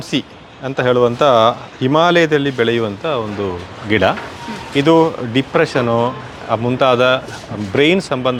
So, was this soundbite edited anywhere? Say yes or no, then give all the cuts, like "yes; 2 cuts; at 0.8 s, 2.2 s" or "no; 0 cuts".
no; 0 cuts